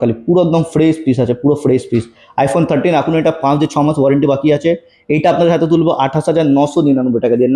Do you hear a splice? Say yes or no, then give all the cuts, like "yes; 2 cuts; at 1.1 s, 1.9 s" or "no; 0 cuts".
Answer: no; 0 cuts